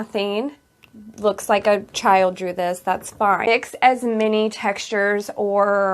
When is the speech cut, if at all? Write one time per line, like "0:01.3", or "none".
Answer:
0:03.5